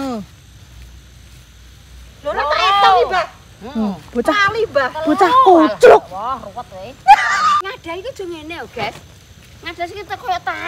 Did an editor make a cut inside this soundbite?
yes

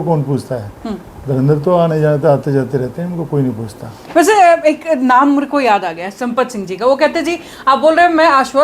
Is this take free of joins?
yes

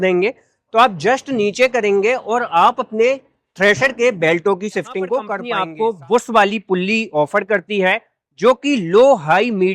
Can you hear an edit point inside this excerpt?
yes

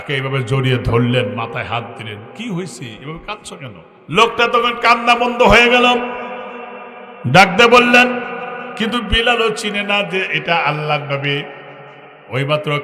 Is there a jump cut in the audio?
yes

